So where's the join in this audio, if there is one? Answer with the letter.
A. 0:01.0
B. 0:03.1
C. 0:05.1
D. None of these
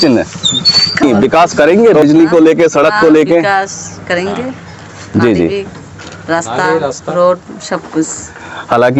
A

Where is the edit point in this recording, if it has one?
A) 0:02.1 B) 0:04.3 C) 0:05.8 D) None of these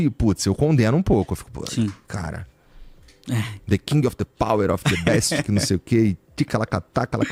D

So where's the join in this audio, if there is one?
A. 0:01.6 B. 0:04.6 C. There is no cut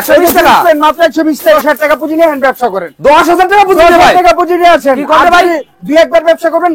A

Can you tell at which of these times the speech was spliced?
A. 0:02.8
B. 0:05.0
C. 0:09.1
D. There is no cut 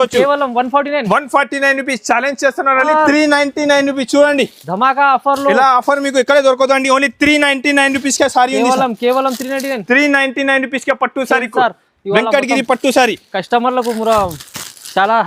A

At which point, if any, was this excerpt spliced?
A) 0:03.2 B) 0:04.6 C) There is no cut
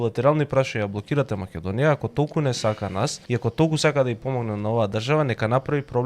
A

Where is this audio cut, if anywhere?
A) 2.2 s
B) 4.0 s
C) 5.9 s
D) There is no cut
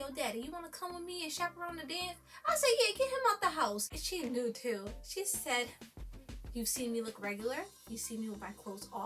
B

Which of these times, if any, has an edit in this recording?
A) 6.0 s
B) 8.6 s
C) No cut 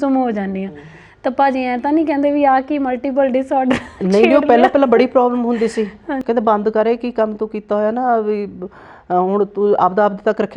C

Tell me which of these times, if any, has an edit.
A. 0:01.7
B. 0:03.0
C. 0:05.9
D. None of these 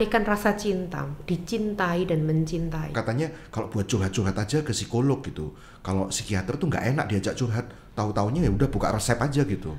B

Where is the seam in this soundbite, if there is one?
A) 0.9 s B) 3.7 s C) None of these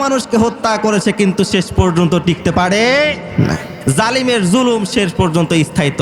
B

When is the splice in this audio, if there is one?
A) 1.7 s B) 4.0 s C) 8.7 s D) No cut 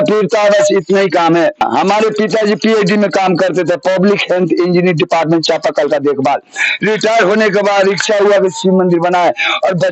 A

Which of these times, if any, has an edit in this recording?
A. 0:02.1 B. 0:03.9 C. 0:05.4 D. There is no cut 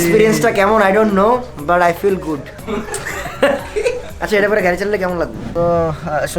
C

